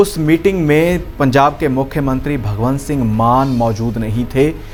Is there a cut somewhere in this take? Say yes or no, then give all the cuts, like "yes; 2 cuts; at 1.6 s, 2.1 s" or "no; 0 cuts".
no; 0 cuts